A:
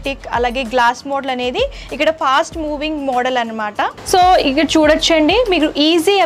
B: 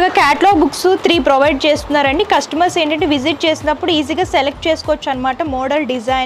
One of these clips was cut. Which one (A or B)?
A